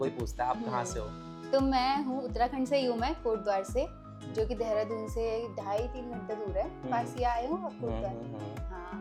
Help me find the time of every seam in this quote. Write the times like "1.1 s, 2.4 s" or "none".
none